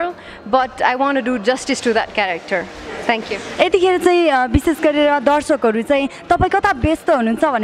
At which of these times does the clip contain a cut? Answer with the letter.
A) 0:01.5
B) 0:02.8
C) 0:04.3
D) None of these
D